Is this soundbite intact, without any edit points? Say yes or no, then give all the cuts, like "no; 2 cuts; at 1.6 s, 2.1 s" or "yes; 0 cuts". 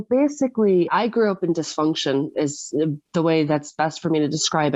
yes; 0 cuts